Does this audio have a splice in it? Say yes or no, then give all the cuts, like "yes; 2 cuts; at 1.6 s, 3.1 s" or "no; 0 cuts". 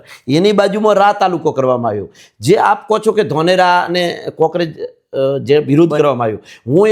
no; 0 cuts